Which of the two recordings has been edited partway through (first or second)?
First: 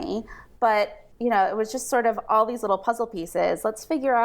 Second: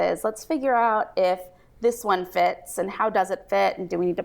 first